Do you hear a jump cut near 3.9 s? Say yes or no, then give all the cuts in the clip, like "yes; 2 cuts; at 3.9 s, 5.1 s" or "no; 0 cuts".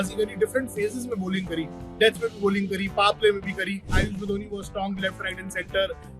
yes; 1 cut; at 3.9 s